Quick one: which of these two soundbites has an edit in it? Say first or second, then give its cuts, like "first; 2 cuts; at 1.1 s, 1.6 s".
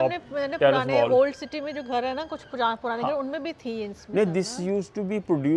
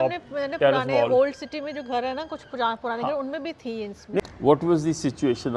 second; 1 cut; at 4.2 s